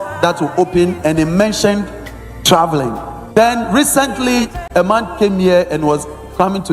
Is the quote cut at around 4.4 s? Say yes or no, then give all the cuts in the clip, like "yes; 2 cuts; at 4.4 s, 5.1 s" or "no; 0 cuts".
yes; 1 cut; at 4.4 s